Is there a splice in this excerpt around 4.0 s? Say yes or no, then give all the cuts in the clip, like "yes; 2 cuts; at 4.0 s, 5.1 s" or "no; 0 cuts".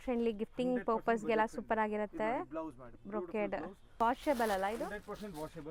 yes; 1 cut; at 4.0 s